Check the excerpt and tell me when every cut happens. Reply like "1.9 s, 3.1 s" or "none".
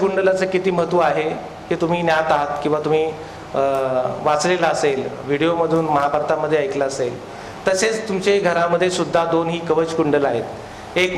none